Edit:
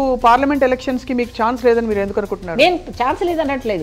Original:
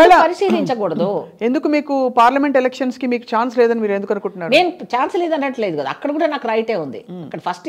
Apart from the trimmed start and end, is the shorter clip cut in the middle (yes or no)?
no